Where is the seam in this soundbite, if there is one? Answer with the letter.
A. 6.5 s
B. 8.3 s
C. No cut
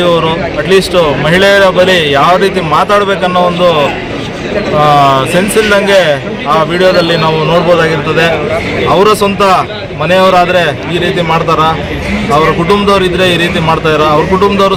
C